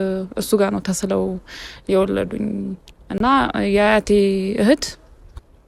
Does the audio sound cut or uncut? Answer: uncut